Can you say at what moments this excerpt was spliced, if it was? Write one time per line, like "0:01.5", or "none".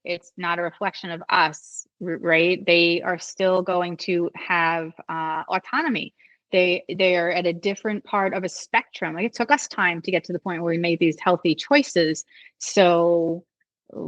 none